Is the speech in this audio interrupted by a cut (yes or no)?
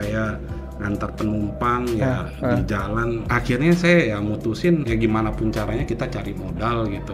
yes